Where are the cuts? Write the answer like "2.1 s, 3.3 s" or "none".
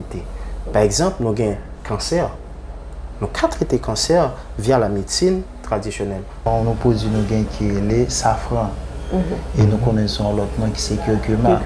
6.5 s